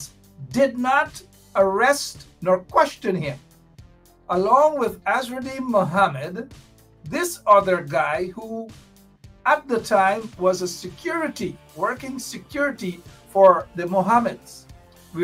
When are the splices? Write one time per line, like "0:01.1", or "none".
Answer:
none